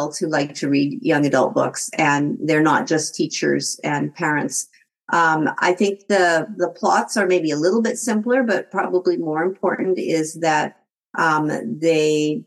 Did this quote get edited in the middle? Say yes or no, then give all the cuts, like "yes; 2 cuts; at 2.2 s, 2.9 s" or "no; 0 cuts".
no; 0 cuts